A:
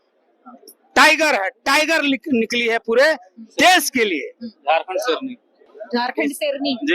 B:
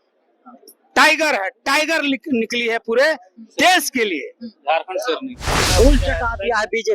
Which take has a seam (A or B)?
B